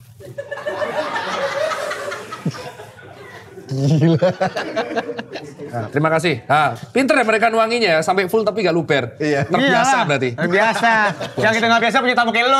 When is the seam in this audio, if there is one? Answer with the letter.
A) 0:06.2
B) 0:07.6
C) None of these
C